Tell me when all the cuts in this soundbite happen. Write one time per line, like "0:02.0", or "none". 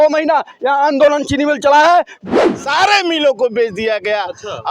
0:02.2